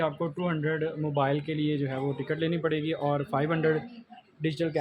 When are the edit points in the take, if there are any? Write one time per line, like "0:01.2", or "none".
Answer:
none